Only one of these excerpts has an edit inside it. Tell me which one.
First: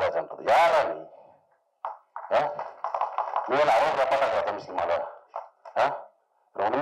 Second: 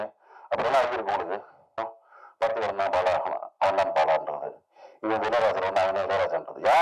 second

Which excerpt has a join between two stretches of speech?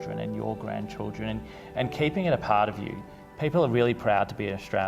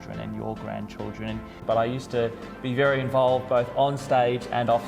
second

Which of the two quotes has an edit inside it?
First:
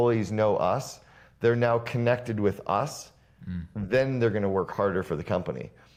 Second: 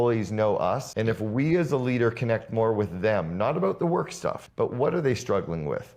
second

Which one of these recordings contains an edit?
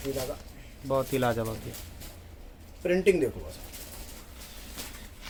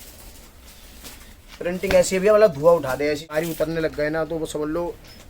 second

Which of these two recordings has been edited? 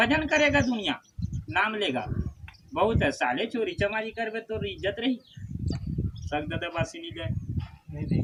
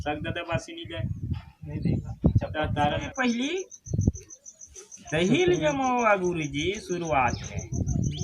second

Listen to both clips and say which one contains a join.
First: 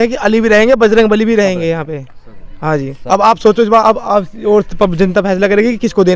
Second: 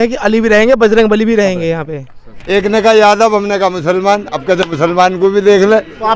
second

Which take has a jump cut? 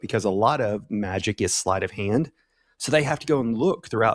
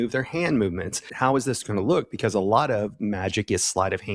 second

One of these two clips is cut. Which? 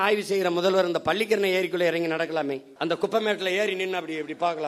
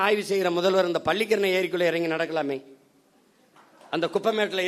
first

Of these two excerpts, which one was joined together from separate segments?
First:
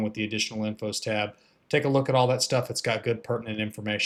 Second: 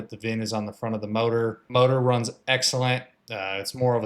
second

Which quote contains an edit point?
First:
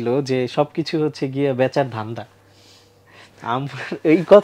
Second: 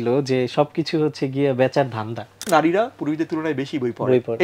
second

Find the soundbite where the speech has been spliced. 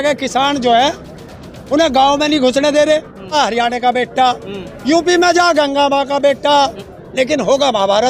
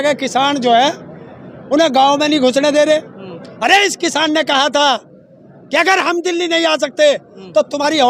first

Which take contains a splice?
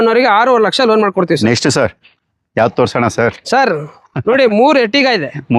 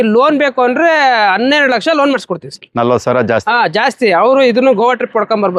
first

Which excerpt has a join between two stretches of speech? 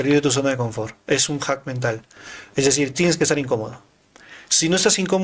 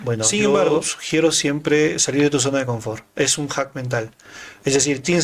second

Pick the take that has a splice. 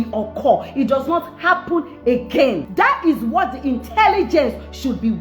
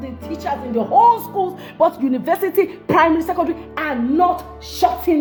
first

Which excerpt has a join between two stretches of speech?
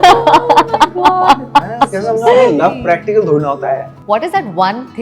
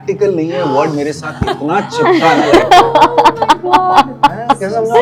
first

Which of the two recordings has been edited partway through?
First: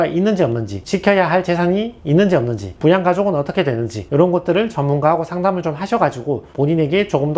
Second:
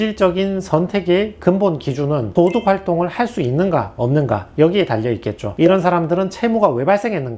second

